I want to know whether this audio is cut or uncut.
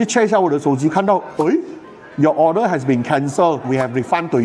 uncut